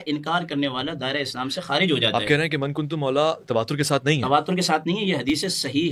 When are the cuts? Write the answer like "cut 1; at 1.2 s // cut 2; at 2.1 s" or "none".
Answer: none